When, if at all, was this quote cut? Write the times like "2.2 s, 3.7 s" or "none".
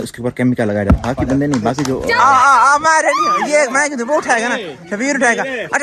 2.0 s